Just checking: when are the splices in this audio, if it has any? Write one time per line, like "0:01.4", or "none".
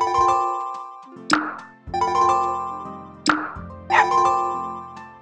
0:00.9